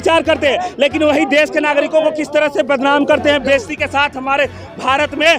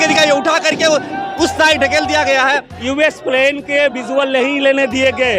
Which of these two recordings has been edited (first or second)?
second